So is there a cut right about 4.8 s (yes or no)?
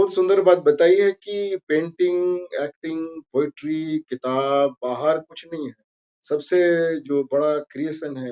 no